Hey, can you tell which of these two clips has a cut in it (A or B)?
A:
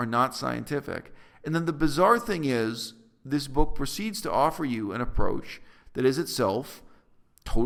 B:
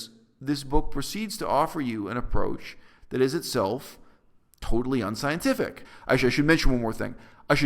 B